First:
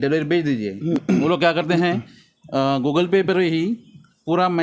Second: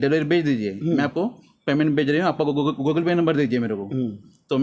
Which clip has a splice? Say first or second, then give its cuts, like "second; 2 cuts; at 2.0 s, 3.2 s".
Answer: first; 1 cut; at 1.0 s